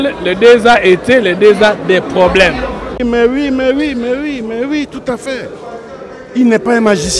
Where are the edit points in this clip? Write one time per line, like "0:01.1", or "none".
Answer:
0:03.0